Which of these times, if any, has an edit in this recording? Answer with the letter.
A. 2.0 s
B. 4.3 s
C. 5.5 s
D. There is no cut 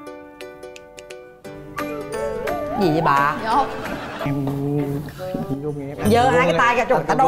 B